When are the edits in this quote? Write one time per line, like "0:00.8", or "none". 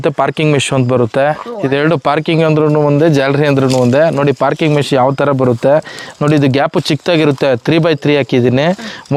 none